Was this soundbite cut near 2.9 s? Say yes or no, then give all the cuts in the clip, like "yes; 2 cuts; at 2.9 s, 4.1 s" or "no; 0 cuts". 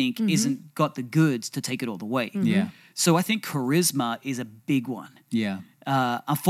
no; 0 cuts